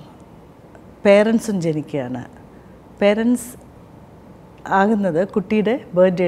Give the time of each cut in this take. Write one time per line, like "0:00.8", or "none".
none